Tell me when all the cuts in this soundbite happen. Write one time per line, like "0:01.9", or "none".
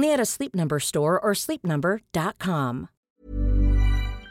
0:03.2